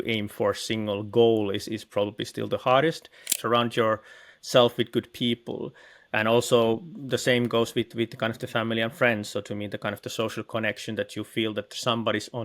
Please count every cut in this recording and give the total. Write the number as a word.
one